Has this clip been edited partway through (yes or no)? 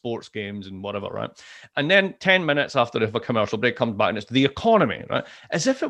no